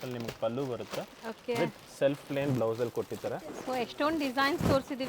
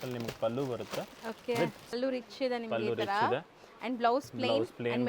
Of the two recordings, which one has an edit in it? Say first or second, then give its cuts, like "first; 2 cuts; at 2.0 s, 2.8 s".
second; 1 cut; at 1.9 s